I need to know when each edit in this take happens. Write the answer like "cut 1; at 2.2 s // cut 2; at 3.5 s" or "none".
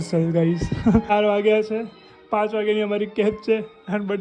cut 1; at 1.1 s